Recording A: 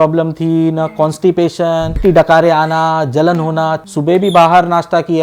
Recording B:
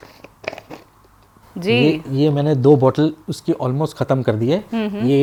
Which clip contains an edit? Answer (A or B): A